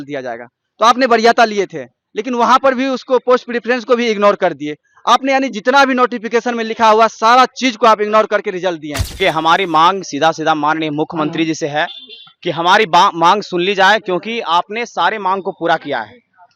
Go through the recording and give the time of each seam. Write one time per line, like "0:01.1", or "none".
0:09.2